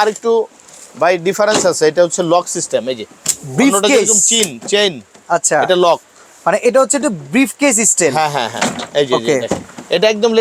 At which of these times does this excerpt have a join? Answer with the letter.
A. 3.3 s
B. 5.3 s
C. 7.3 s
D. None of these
D